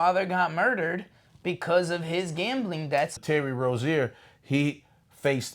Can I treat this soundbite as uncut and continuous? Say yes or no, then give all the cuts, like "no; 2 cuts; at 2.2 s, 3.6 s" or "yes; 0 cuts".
no; 1 cut; at 3.1 s